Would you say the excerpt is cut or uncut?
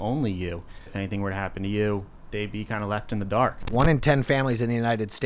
cut